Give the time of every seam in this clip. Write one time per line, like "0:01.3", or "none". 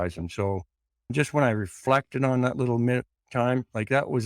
0:01.1

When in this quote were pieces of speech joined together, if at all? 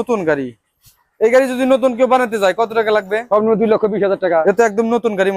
0:03.2
0:04.4

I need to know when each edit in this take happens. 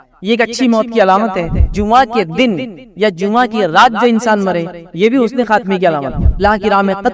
0:01.7
0:06.4

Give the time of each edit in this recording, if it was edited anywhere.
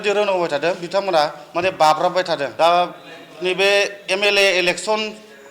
0:02.5

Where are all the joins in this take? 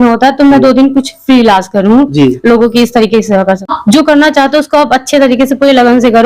0:03.7

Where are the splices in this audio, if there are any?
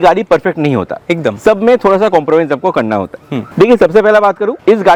none

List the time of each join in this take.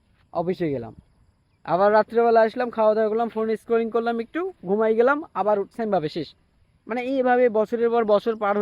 none

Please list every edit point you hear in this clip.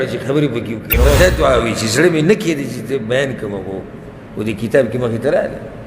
0:01.1

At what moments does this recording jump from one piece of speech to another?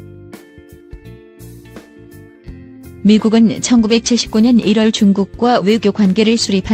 none

